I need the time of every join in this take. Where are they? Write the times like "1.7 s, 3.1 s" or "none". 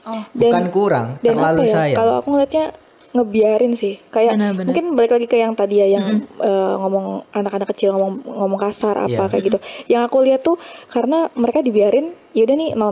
none